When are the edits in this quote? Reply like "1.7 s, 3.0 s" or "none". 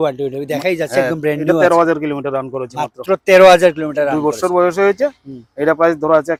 none

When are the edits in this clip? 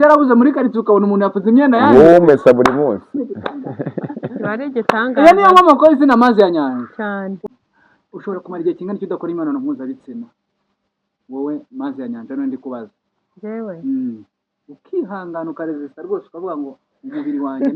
7.4 s

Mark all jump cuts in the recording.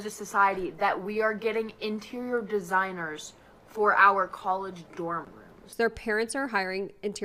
5.6 s

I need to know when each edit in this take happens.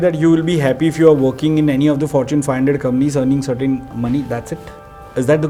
none

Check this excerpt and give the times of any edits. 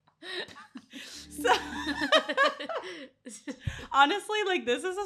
none

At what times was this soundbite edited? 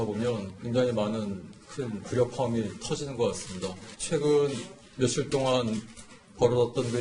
none

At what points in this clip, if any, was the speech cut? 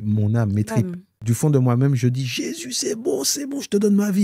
1.2 s

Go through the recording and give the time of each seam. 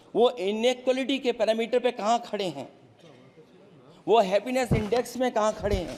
none

